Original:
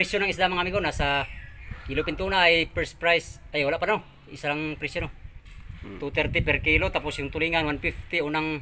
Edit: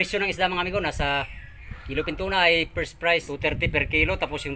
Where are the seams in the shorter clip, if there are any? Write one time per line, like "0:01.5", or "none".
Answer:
0:03.3